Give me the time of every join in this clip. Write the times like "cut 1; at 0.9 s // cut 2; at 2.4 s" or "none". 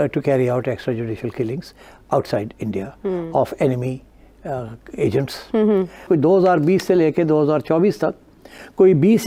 none